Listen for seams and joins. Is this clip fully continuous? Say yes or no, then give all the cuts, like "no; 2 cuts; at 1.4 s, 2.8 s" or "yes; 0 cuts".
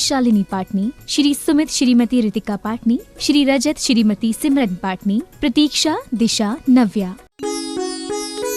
no; 1 cut; at 7.1 s